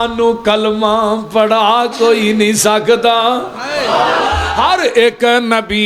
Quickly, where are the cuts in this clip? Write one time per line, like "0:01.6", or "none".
0:04.4